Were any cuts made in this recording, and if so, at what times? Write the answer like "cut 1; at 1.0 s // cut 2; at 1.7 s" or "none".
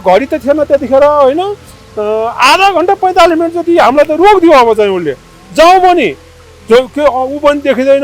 none